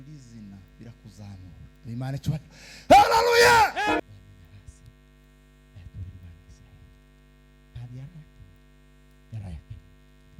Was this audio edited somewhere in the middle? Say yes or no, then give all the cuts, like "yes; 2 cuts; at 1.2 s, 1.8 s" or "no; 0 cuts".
yes; 1 cut; at 4.0 s